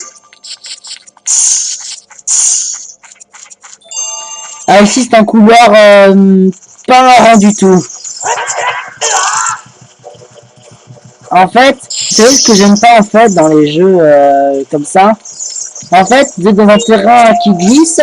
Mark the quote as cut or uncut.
cut